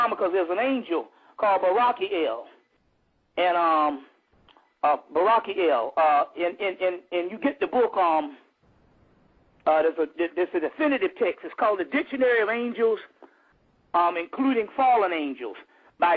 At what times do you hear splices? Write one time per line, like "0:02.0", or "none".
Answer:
0:04.7